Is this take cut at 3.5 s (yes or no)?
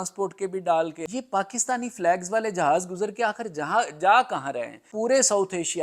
no